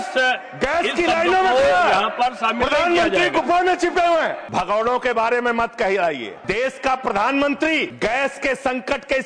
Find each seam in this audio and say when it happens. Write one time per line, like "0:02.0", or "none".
0:04.4
0:06.3
0:07.9